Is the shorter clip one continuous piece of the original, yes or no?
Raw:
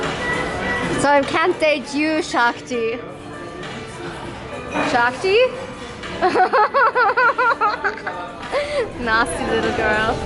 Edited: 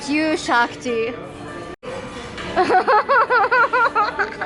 no